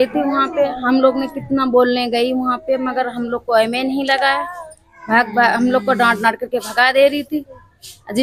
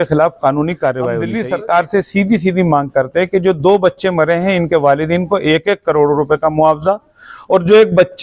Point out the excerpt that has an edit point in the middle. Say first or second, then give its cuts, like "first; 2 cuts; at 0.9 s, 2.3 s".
second; 1 cut; at 1.2 s